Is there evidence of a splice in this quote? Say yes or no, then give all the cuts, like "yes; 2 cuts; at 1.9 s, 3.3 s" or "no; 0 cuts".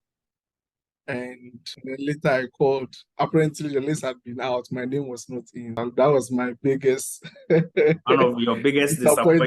yes; 2 cuts; at 1.7 s, 5.6 s